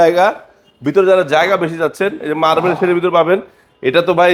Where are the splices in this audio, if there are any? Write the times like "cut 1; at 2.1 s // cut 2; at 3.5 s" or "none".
none